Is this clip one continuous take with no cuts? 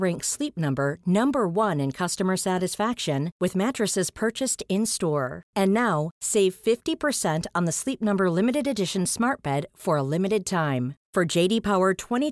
yes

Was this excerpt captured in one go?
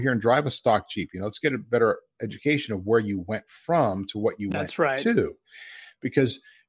yes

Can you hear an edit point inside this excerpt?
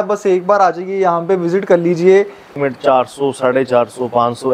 yes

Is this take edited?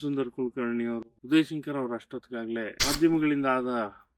yes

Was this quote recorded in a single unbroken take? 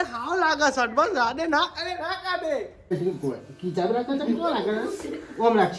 no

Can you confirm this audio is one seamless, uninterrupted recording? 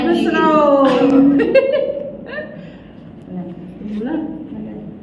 yes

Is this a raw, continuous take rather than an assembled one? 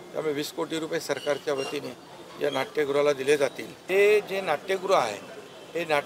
no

